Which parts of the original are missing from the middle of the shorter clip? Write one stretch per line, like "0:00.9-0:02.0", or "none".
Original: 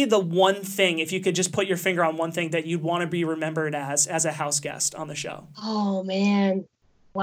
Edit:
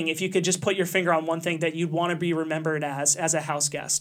none

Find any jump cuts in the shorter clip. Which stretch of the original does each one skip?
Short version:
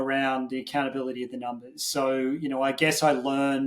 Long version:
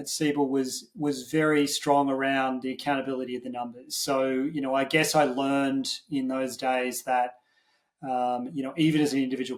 none

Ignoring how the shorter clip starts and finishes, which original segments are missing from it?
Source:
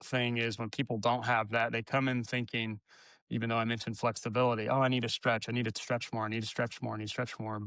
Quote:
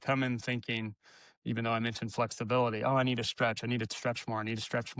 none

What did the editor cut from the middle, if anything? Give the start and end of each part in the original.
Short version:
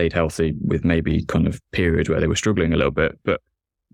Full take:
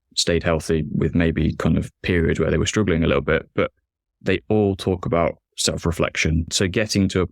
none

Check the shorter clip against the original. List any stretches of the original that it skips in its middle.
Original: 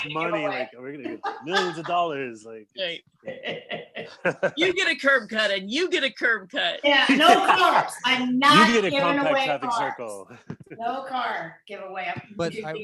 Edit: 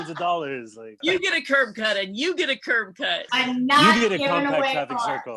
0:02.7-0:04.5
0:06.7-0:07.9

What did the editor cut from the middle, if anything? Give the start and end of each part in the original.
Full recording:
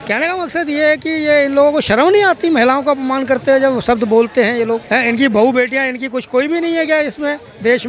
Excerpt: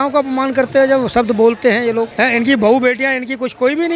none

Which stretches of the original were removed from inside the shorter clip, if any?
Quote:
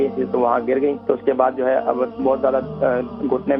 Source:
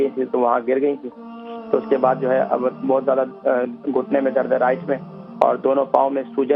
0:01.0-0:01.6

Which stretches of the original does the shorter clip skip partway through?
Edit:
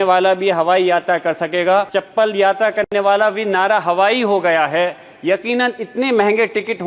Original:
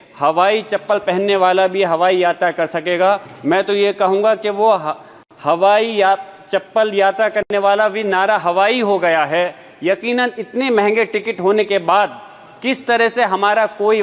0:03.3-0:06.5

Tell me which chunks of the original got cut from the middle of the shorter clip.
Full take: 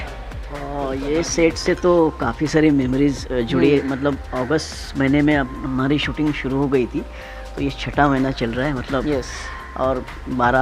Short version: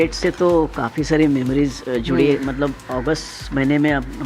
none

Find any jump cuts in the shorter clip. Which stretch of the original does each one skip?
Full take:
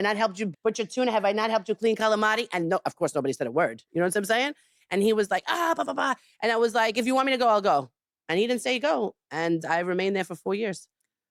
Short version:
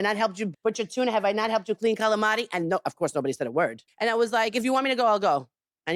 0:03.8-0:06.3

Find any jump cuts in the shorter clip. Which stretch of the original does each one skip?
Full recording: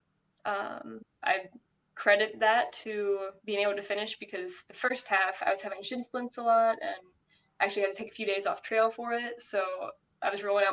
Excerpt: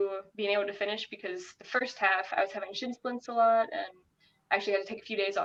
none

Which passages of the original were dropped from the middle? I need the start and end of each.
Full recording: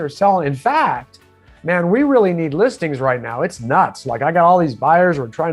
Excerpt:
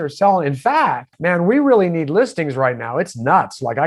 0:01.1-0:01.5

